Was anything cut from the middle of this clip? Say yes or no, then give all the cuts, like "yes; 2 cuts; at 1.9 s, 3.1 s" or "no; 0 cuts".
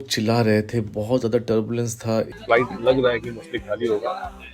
yes; 1 cut; at 2.3 s